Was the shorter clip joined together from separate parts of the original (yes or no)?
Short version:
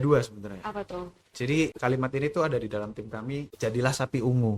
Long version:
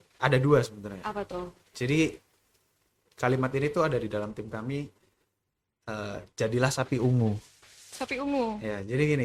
yes